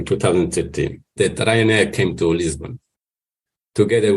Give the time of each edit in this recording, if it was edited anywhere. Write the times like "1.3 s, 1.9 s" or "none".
1.1 s